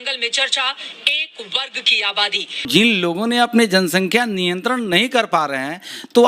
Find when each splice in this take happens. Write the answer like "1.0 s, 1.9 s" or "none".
2.6 s